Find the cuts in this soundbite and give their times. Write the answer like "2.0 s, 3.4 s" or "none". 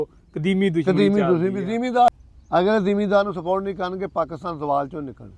2.1 s